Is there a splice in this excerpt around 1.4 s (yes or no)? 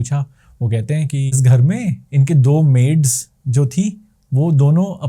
yes